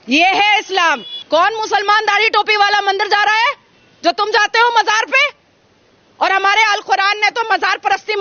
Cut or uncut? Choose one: cut